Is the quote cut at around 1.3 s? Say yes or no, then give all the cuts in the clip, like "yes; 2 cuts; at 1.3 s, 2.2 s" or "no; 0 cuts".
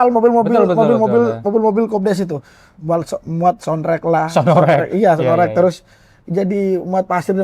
no; 0 cuts